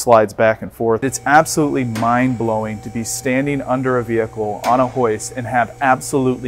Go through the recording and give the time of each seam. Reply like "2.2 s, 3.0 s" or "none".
1.0 s

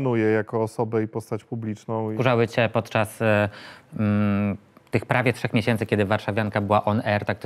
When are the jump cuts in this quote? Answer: 2.1 s

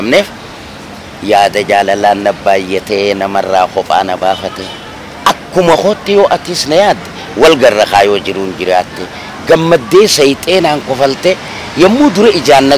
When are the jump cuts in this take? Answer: none

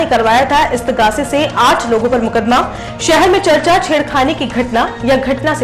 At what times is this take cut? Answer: none

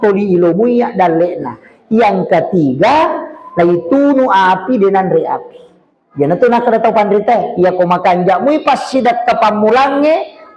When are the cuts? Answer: none

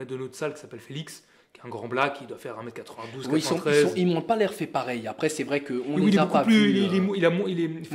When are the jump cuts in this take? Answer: none

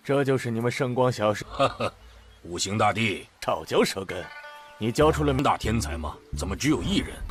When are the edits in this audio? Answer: none

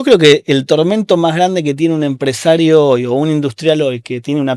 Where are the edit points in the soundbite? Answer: none

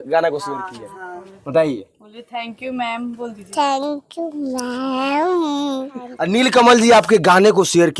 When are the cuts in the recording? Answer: 6.0 s

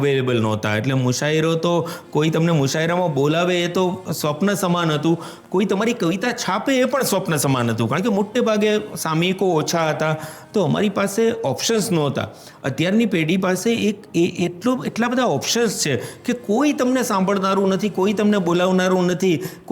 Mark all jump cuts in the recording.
10.4 s

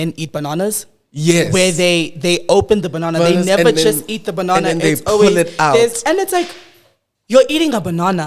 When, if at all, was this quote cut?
none

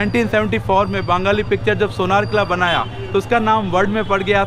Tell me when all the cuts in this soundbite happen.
none

